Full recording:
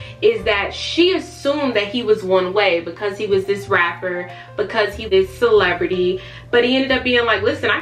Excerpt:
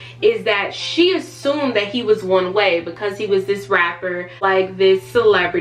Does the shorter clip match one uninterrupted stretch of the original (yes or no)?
no